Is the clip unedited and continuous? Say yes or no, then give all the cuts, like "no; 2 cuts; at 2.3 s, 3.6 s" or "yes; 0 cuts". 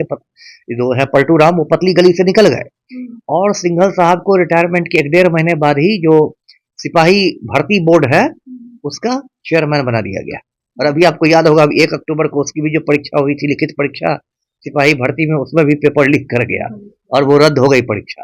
yes; 0 cuts